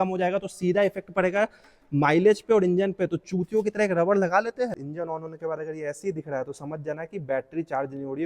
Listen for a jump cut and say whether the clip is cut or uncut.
cut